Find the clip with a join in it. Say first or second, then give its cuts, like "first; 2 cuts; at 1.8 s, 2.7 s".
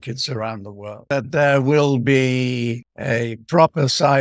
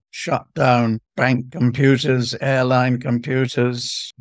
first; 1 cut; at 1.0 s